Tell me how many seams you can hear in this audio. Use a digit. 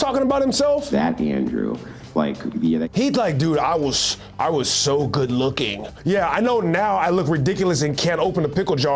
1